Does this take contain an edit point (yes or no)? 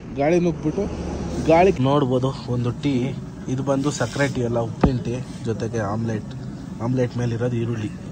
yes